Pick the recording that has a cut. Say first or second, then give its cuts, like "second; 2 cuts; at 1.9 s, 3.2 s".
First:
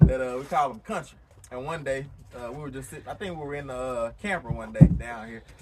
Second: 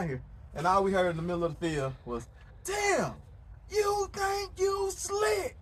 first; 1 cut; at 1.4 s